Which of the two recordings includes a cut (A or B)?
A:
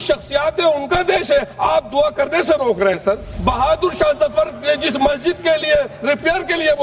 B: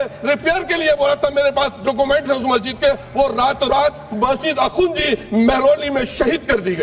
A